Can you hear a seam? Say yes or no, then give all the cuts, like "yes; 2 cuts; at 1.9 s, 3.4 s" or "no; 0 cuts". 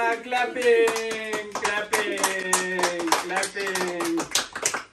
no; 0 cuts